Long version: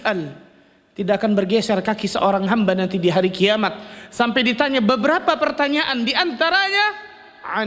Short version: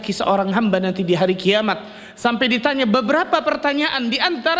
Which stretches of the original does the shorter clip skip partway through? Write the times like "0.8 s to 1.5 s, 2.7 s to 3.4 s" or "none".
none